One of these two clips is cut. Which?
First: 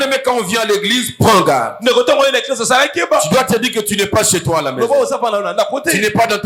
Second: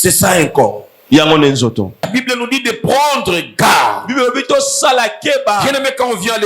second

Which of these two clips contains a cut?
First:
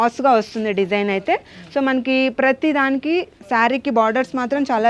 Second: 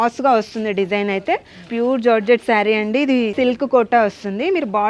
second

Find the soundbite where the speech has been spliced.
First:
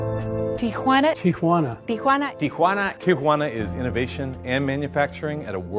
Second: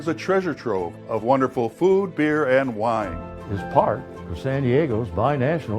first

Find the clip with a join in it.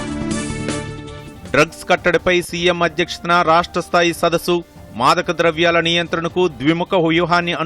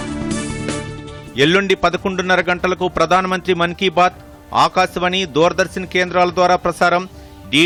first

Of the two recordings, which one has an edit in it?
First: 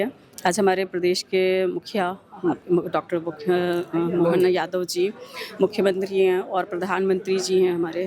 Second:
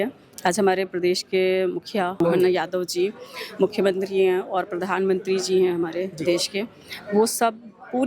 second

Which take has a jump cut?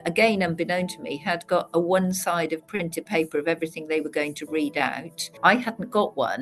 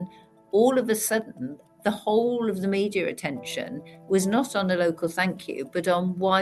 first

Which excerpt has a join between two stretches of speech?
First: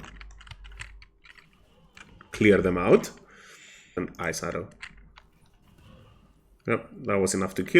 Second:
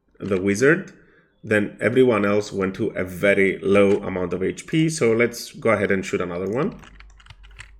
first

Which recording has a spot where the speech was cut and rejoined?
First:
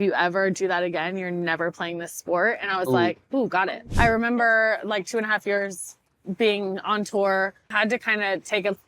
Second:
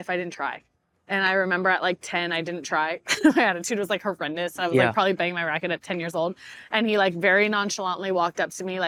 first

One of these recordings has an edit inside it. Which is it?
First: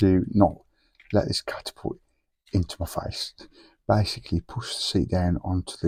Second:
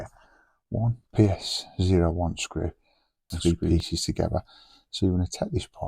second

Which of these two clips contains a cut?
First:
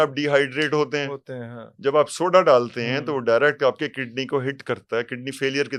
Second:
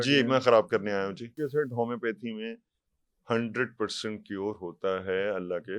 second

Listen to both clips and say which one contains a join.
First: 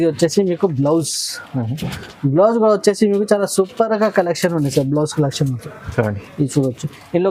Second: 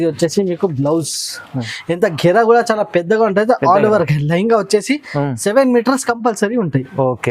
second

